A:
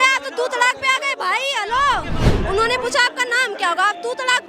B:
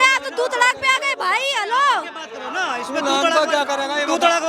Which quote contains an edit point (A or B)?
A